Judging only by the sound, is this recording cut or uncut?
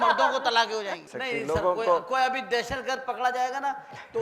cut